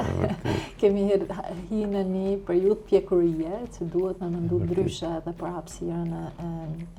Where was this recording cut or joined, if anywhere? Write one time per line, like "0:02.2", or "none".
none